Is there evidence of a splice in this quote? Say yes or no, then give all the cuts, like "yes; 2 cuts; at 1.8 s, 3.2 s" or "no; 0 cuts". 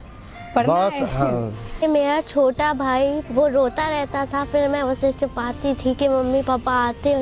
yes; 2 cuts; at 1.8 s, 3.2 s